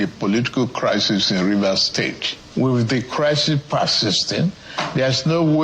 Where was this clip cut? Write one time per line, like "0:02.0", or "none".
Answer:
0:04.7